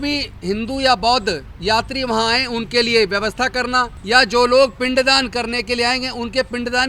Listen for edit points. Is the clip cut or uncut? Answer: cut